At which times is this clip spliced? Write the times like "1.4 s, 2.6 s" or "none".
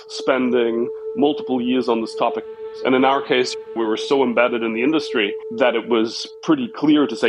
2.5 s